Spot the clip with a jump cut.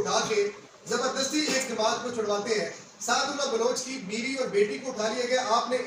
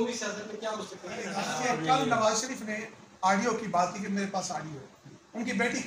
second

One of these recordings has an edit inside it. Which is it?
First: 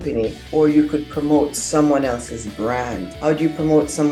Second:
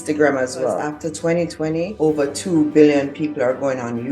second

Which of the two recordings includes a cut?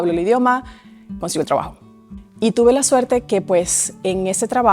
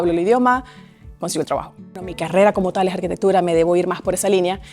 second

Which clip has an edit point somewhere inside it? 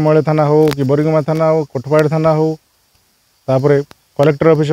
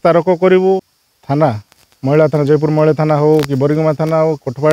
second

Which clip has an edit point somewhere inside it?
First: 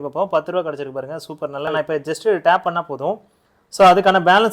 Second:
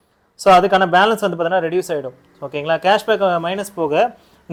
first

